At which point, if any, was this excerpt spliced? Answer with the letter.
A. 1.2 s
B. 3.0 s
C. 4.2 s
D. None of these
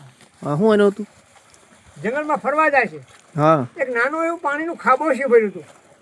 D